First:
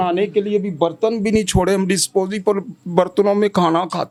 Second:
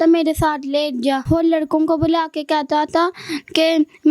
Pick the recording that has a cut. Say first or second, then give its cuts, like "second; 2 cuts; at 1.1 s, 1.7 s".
second; 1 cut; at 1.2 s